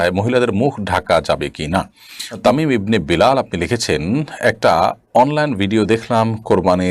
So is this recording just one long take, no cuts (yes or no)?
no